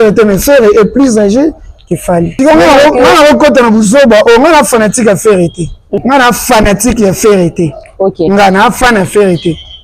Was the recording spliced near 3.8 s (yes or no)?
no